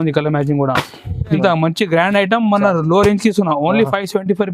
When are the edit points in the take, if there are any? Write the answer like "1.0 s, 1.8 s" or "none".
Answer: 1.4 s